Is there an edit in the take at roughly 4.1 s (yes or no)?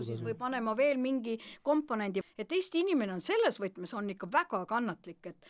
no